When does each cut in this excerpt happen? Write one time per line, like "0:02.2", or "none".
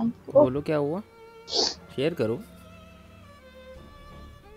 none